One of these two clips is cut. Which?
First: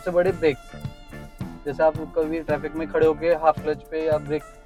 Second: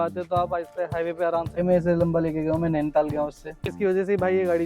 second; 2 cuts; at 1.6 s, 3.7 s

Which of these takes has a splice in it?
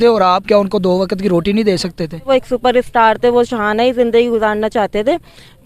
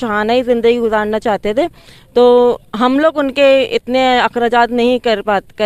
first; 1 cut; at 2.3 s

